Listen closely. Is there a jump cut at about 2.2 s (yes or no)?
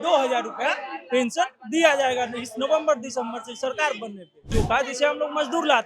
no